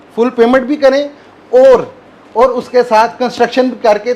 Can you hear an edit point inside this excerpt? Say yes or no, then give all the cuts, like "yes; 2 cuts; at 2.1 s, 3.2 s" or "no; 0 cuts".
no; 0 cuts